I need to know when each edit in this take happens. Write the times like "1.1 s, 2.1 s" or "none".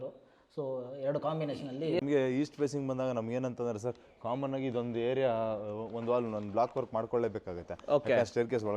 2.0 s